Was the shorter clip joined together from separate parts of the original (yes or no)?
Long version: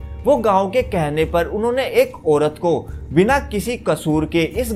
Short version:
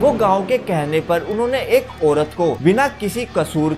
yes